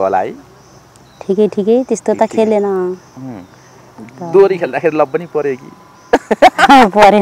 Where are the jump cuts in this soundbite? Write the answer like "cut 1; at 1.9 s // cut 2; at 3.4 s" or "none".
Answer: none

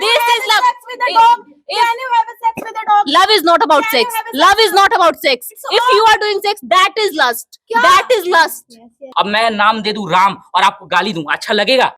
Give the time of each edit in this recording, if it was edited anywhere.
cut 1; at 9.0 s

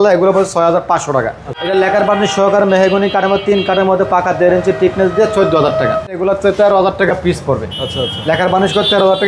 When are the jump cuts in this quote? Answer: cut 1; at 1.6 s // cut 2; at 6.2 s

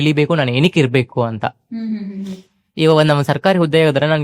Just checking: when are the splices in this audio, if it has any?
none

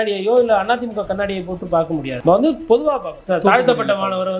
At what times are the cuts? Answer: cut 1; at 2.1 s // cut 2; at 3.2 s

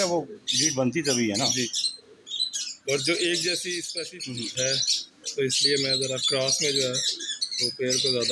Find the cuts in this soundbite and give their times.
cut 1; at 3.9 s

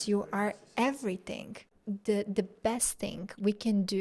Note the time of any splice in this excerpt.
cut 1; at 1.7 s

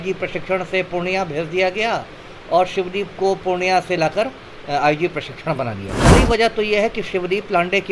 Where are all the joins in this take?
cut 1; at 6.1 s

